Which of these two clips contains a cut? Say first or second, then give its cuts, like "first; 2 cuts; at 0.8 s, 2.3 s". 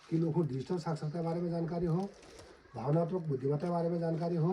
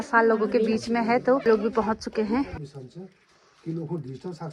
second; 2 cuts; at 1.5 s, 2.5 s